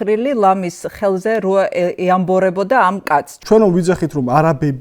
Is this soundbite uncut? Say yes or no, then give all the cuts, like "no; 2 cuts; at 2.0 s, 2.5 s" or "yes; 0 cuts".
no; 1 cut; at 3.3 s